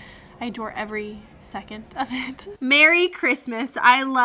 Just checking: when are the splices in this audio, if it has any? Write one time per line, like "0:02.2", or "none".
0:02.6